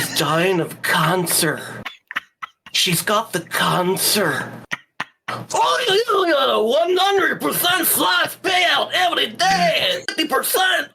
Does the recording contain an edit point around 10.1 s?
yes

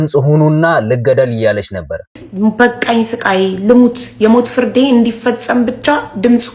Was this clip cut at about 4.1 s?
no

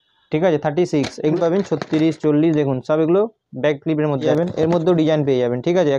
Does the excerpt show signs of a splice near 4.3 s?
yes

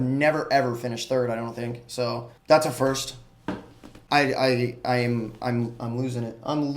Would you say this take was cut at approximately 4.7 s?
no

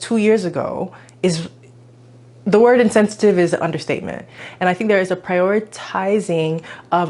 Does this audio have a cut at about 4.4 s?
yes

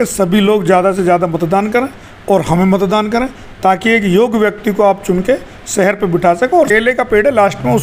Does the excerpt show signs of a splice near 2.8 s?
no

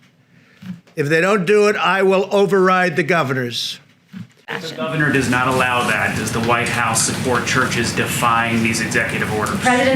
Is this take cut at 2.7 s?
no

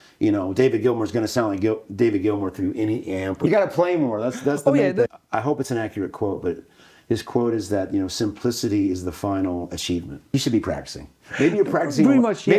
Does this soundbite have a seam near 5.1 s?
yes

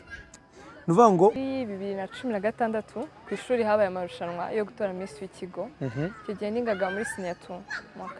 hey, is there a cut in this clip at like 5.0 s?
no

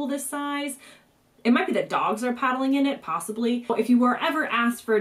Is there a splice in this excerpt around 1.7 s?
no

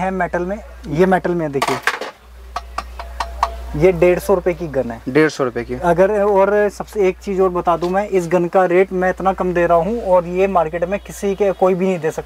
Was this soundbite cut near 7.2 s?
no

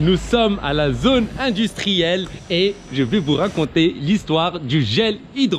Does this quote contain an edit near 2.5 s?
no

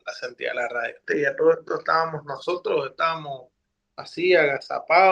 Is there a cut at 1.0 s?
yes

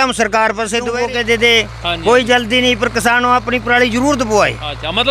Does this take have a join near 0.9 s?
yes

